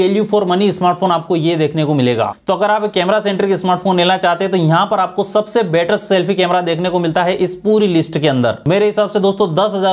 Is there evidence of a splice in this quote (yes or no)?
yes